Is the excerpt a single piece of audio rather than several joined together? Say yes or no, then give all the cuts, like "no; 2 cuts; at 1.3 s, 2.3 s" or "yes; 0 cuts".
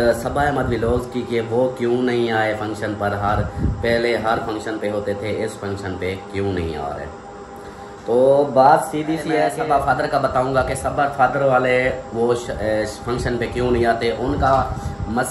no; 1 cut; at 9.5 s